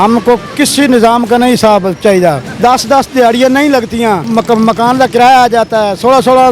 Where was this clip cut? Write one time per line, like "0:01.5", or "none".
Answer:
0:02.5
0:04.2